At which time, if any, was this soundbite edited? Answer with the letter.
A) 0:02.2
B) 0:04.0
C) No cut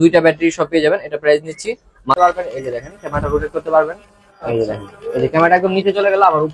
A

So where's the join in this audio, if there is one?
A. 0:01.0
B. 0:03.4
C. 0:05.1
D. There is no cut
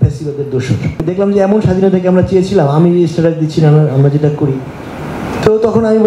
A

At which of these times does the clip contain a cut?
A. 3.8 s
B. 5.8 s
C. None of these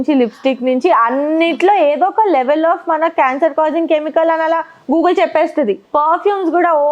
B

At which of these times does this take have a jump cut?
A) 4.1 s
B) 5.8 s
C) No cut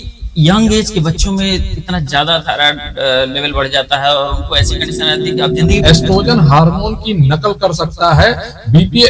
B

